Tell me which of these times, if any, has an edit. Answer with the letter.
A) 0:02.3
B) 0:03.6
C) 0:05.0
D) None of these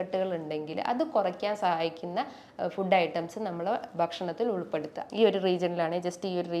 C